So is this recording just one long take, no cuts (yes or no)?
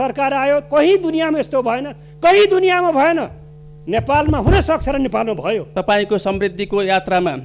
no